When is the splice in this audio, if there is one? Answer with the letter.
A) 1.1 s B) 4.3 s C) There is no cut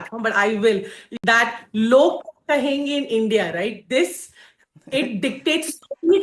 A